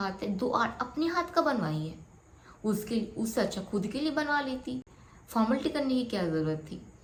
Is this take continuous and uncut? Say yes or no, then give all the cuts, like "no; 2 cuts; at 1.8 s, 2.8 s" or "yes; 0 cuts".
yes; 0 cuts